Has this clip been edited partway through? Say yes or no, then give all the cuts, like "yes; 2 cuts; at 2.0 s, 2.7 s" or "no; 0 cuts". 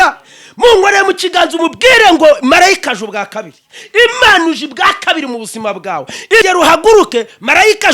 yes; 1 cut; at 6.4 s